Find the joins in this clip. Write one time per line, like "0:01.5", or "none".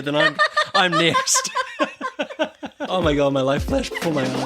0:02.9